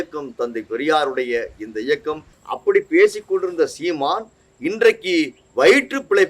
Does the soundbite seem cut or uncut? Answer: cut